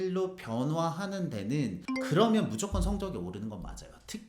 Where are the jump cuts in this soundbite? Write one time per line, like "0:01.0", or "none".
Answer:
0:01.9